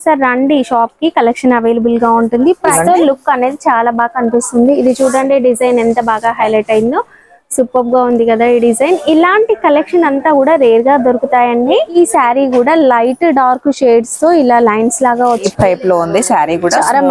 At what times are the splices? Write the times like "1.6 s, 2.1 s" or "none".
2.7 s, 12.0 s, 15.5 s